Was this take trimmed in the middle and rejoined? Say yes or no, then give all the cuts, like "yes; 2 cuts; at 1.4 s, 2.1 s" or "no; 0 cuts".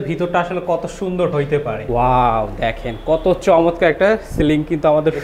yes; 1 cut; at 1.9 s